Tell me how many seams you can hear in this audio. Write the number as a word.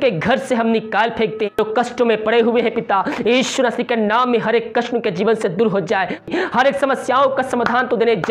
two